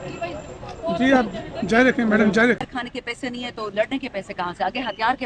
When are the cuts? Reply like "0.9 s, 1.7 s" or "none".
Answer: 2.7 s